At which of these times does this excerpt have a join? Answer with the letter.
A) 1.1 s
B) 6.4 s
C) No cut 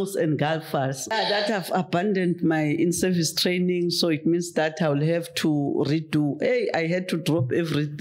A